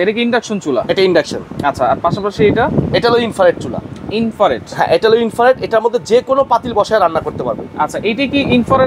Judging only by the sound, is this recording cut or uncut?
uncut